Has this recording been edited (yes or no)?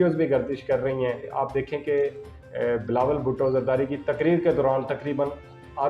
yes